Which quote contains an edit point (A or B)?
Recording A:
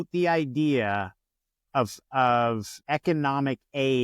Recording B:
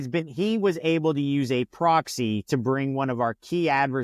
A